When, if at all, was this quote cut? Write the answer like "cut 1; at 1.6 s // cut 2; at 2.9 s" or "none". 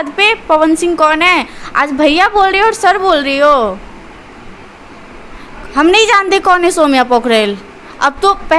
none